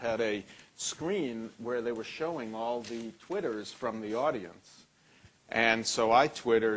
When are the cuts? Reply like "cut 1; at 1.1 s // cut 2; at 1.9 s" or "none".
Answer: cut 1; at 3.6 s